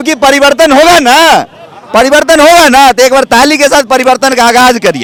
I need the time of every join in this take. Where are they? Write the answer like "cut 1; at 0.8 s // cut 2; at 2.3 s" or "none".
none